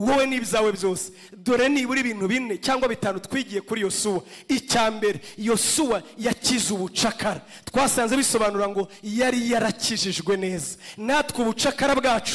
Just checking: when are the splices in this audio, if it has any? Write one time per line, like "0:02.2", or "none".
none